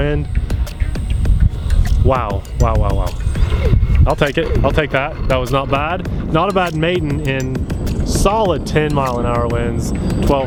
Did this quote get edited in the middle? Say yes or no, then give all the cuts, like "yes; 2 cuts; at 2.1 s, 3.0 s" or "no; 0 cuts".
no; 0 cuts